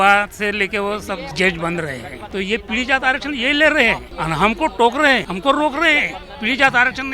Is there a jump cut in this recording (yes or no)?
yes